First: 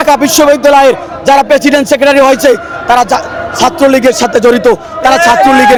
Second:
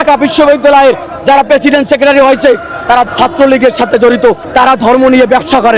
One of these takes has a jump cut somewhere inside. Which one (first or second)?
second